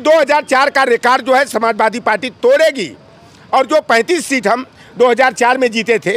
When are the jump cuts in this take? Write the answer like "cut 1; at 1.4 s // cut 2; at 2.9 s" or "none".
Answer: none